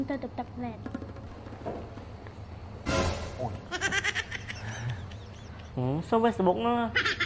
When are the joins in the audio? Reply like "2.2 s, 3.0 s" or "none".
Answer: 1.2 s, 5.5 s